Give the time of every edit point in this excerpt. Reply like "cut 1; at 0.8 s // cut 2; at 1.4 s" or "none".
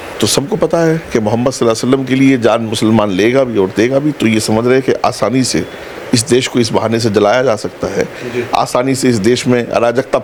none